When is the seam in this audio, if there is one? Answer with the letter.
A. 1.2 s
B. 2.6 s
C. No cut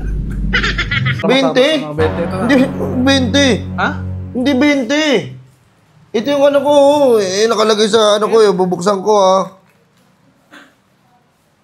A